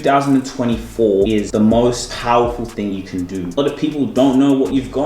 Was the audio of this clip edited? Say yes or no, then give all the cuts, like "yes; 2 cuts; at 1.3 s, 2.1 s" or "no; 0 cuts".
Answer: yes; 3 cuts; at 1.4 s, 2.1 s, 3.6 s